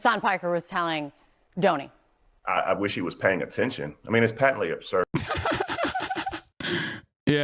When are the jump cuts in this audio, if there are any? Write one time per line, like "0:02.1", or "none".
0:05.1
0:06.5